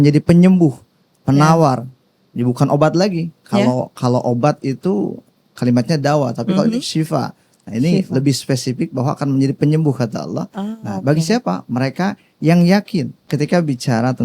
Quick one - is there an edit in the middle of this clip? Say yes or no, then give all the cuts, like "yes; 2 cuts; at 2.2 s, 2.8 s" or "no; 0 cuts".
yes; 1 cut; at 13.3 s